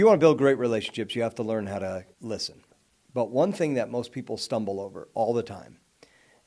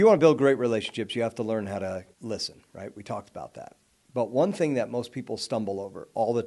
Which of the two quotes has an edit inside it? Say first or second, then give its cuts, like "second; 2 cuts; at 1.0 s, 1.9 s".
first; 1 cut; at 2.7 s